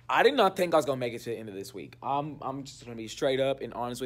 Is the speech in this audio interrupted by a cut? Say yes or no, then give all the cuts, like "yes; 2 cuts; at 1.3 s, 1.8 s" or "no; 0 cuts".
no; 0 cuts